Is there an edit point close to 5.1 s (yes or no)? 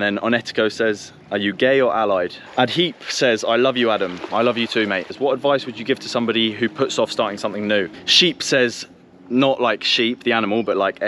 yes